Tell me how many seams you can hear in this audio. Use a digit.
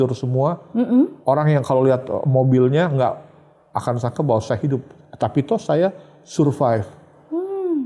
1